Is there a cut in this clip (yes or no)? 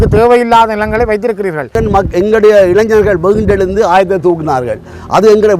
yes